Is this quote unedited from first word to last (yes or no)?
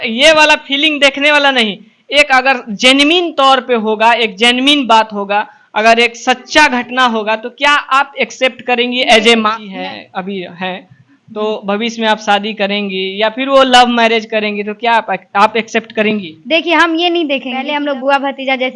no